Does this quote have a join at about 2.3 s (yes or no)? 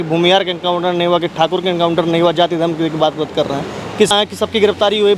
no